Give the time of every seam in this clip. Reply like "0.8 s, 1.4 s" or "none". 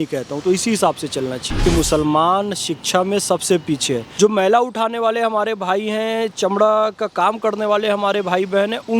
1.7 s, 4.1 s